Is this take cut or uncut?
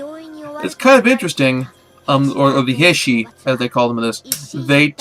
cut